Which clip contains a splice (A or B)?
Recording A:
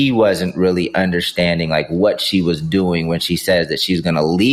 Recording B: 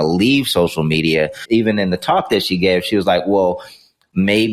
B